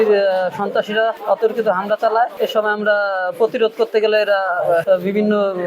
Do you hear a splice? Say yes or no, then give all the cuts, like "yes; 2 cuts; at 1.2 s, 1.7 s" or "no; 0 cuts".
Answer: yes; 3 cuts; at 1.2 s, 2.3 s, 4.8 s